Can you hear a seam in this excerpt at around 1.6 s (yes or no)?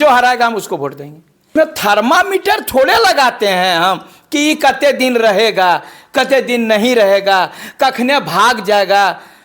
yes